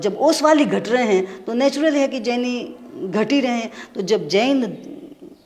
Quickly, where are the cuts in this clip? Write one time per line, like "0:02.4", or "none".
none